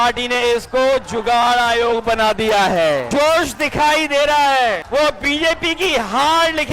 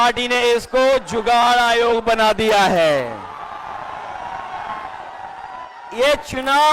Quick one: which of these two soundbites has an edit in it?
first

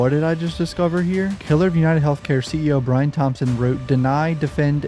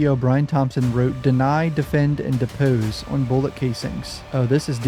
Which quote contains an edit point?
first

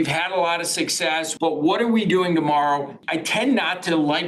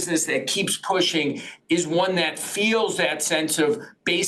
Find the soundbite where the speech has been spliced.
first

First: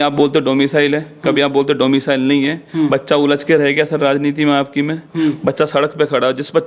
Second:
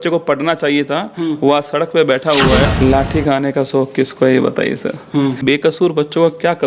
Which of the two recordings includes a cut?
second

